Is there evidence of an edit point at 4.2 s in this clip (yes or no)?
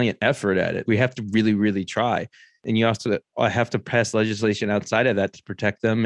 no